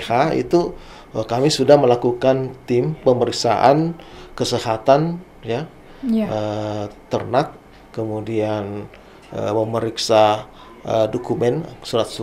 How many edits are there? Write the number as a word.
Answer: zero